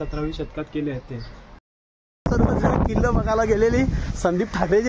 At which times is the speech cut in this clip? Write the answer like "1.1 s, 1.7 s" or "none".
1.6 s